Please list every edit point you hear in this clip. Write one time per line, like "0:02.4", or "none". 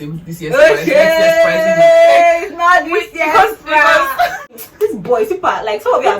0:04.6

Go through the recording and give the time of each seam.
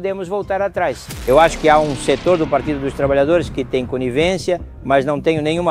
0:01.1

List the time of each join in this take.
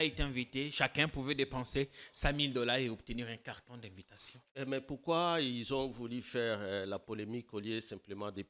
none

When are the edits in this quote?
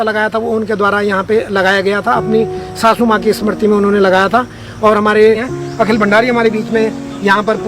0:05.5

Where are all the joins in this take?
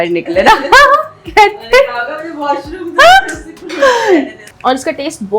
0:04.4

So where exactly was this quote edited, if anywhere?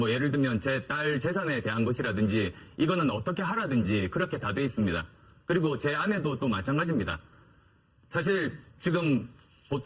0:06.8

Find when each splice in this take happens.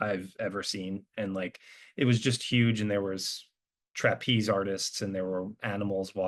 none

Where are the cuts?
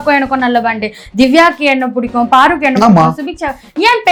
none

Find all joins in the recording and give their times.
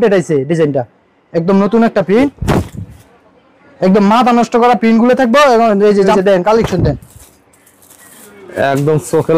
0:02.4
0:06.1

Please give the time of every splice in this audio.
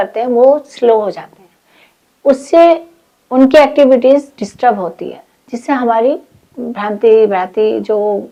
none

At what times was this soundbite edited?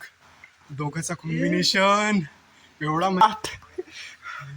0:03.2

